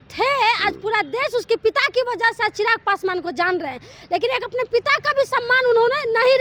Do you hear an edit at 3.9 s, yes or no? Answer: no